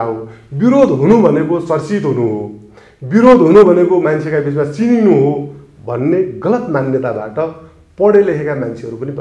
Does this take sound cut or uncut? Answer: uncut